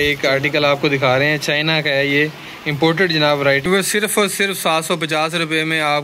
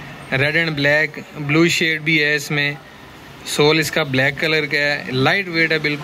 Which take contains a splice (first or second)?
first